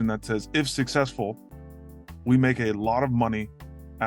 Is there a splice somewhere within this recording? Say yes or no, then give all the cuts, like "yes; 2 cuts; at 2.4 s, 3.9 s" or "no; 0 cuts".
no; 0 cuts